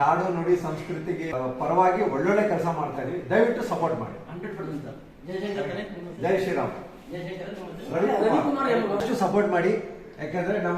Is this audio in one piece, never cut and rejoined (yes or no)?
no